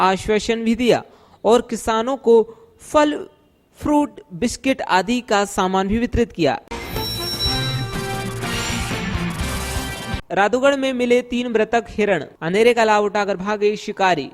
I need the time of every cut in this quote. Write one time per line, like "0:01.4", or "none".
0:06.6
0:10.1